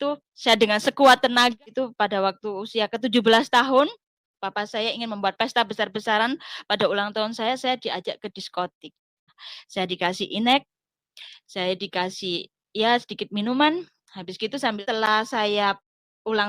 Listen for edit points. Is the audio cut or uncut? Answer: cut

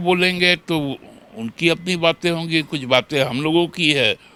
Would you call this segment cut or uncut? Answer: uncut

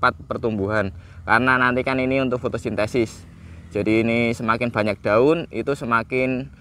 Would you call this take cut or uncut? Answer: uncut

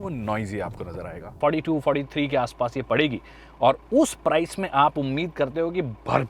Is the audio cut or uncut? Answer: cut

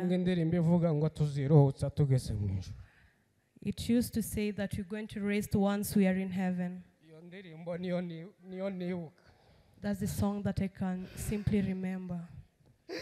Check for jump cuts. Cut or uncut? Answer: uncut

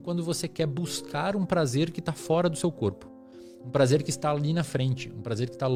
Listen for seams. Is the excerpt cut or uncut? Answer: uncut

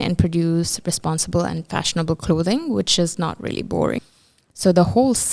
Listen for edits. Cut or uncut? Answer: cut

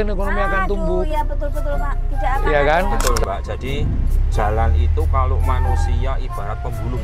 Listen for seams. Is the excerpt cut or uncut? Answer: cut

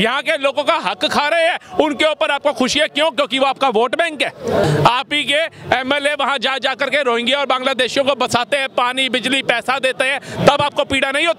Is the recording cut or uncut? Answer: cut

